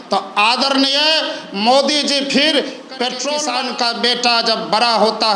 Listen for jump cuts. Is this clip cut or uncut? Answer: cut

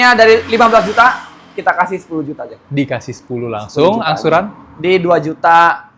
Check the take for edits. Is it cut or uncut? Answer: uncut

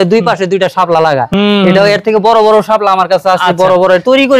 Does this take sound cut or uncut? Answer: uncut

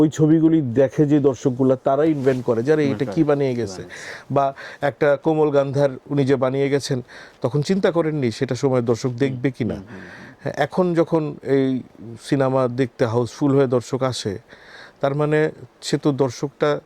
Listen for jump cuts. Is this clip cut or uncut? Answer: uncut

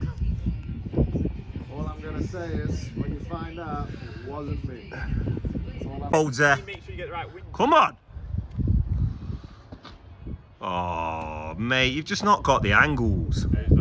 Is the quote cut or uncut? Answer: cut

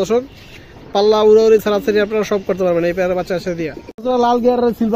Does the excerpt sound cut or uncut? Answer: cut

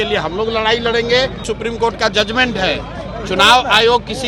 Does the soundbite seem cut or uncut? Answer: cut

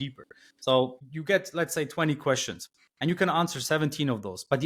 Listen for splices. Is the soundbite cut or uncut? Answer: uncut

